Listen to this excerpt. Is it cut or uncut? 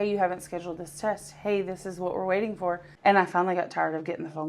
cut